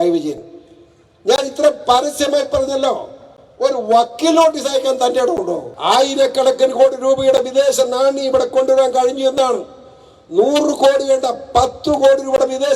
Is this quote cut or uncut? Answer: cut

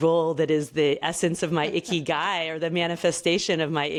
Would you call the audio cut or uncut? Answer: uncut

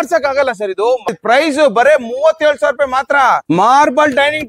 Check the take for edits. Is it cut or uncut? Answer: cut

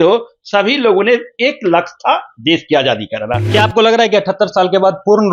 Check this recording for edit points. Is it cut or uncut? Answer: cut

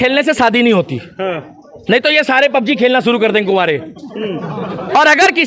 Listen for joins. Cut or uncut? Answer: uncut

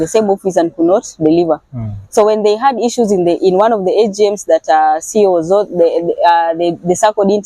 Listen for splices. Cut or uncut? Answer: uncut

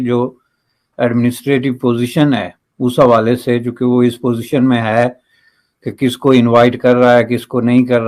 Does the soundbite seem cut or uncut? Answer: uncut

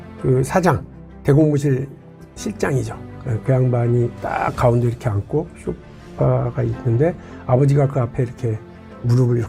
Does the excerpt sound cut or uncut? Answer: uncut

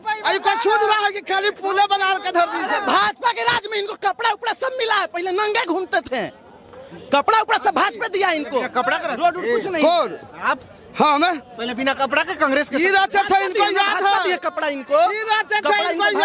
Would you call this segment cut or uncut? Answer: uncut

